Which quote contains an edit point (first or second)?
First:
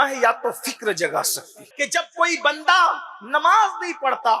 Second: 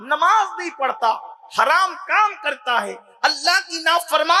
first